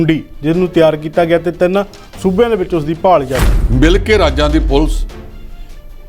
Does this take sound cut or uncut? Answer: cut